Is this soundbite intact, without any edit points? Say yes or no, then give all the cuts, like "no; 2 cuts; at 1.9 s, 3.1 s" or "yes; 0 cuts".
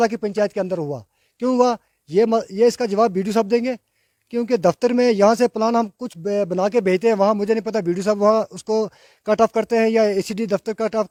yes; 0 cuts